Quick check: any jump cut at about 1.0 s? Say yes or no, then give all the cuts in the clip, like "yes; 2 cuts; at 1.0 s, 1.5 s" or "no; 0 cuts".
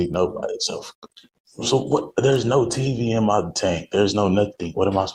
no; 0 cuts